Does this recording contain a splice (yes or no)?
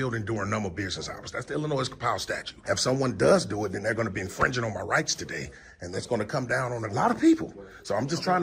yes